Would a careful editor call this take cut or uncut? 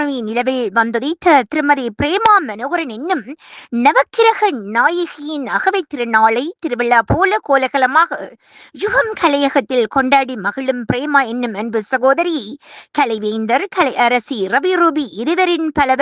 uncut